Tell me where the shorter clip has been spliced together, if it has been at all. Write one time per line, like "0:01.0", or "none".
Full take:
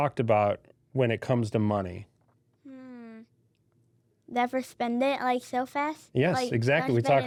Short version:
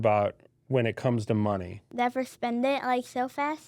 0:01.8

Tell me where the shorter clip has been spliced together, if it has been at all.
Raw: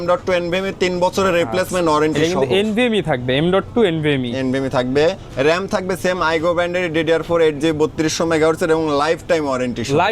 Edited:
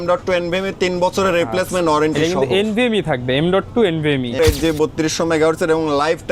0:04.4

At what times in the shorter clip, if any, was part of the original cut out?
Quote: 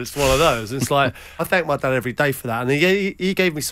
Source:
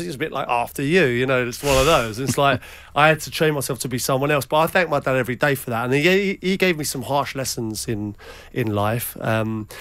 0:01.4

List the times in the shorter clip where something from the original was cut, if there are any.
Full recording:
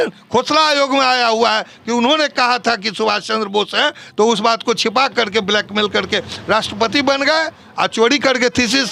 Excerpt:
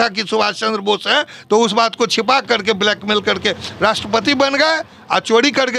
none

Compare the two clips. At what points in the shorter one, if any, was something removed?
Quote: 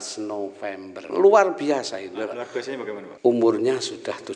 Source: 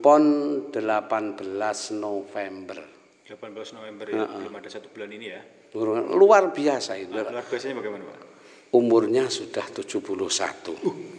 0:01.1
0:03.1

